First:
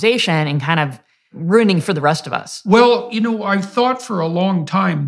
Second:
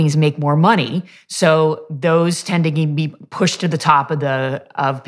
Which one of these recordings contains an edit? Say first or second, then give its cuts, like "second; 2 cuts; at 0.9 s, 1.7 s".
first; 1 cut; at 1.3 s